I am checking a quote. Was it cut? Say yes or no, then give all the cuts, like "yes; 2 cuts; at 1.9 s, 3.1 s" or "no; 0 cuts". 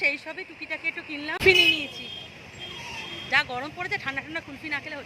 yes; 1 cut; at 1.4 s